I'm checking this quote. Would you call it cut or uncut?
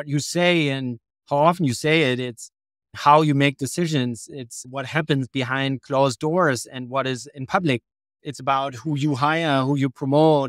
uncut